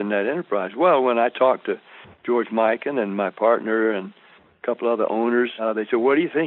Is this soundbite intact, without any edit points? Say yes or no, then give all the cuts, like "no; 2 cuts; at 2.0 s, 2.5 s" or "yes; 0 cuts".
no; 1 cut; at 5.5 s